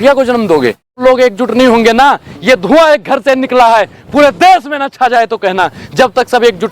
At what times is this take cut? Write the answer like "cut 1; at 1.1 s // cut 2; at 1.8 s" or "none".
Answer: cut 1; at 1.0 s